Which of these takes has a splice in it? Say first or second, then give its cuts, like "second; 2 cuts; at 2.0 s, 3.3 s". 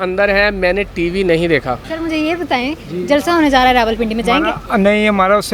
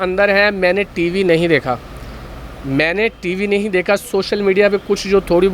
first; 1 cut; at 1.9 s